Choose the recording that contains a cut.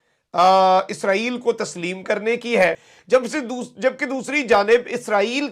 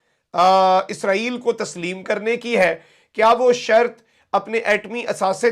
first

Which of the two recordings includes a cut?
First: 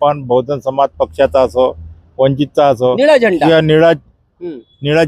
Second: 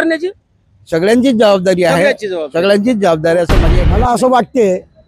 second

